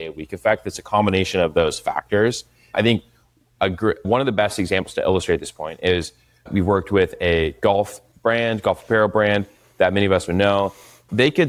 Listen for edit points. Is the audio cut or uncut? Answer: uncut